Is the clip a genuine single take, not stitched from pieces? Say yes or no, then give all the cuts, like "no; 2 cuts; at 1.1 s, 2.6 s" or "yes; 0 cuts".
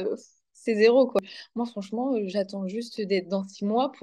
no; 1 cut; at 1.2 s